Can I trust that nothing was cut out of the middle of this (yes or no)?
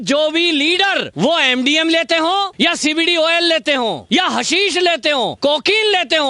no